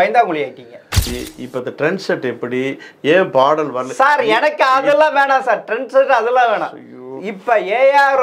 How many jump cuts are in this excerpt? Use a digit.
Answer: 1